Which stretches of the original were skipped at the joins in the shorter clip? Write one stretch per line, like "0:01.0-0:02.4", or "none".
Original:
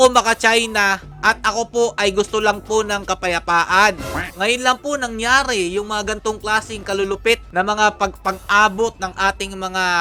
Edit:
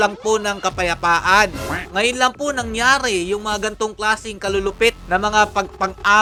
none